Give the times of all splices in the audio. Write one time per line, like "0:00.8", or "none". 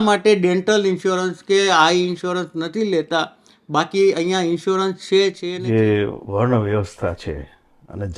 0:05.5